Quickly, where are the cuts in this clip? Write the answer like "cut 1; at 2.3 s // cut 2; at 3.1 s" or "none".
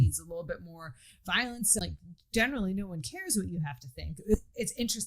cut 1; at 1.9 s // cut 2; at 4.3 s